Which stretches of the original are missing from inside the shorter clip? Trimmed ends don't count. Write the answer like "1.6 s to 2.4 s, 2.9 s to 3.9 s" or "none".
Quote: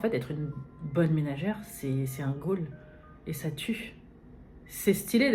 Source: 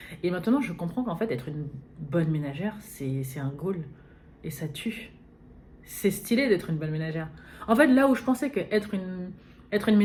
none